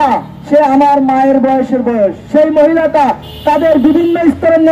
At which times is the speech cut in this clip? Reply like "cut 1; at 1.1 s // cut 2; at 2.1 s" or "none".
none